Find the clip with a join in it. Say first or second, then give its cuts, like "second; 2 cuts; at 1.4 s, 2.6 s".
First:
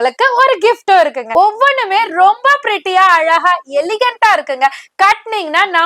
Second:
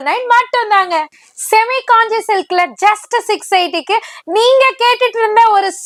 first; 1 cut; at 1.2 s